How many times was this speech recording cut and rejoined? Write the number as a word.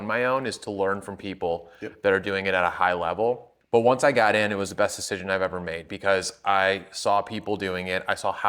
one